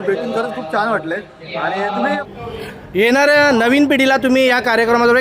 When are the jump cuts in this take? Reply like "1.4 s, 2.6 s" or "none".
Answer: 2.2 s